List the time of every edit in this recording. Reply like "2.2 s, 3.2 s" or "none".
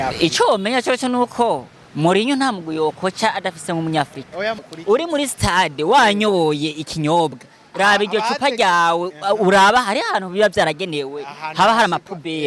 4.6 s